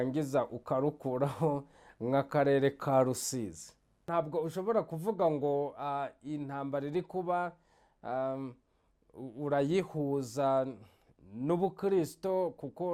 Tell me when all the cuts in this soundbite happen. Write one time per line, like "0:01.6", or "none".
0:04.1